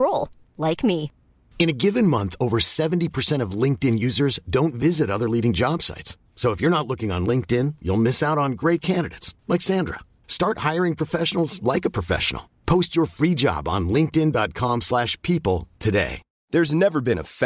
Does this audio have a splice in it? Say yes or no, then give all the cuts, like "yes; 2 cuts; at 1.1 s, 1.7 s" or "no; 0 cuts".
no; 0 cuts